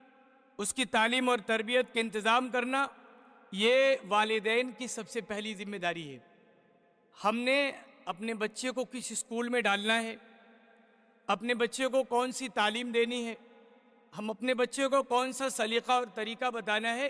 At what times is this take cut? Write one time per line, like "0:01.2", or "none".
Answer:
none